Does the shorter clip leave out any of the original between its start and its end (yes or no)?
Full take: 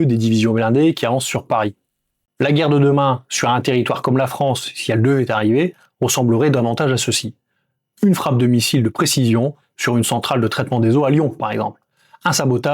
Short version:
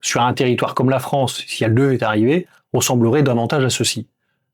no